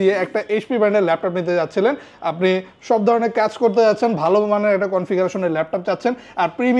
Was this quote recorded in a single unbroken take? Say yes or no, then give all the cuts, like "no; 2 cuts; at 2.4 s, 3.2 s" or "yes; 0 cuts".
yes; 0 cuts